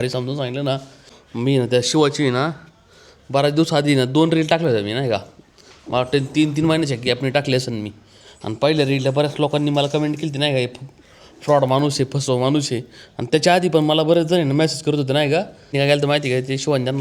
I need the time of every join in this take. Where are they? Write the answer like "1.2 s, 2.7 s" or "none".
0.9 s, 15.7 s